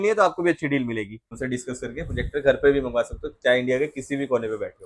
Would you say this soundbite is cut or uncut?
cut